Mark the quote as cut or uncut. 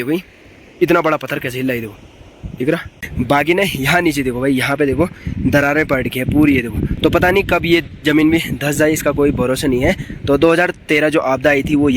cut